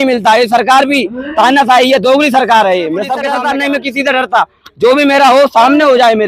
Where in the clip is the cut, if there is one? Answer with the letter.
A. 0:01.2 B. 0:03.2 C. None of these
B